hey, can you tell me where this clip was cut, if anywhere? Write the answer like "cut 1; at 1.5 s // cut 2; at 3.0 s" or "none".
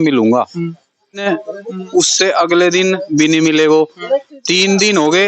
cut 1; at 1.2 s